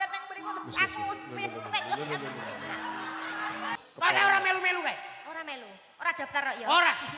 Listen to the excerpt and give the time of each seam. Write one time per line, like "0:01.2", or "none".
0:03.8